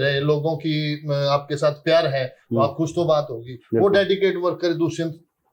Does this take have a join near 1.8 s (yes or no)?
no